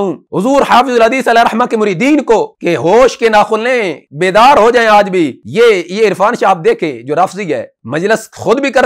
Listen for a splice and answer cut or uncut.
uncut